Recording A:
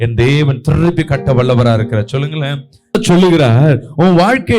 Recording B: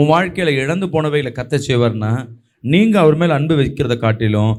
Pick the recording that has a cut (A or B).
A